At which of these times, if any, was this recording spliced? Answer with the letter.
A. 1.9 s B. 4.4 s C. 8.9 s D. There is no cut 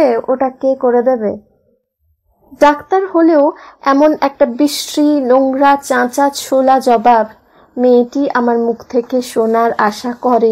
D